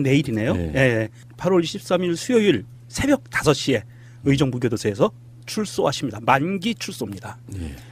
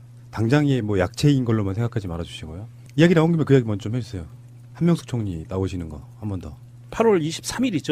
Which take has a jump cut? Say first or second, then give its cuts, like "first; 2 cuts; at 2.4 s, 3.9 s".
second; 1 cut; at 5.9 s